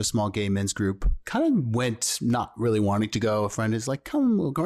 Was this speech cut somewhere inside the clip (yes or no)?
yes